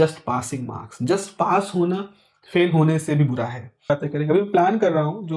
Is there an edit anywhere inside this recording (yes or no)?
yes